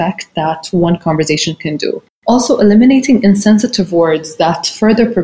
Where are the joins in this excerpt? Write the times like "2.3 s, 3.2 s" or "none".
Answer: 2.1 s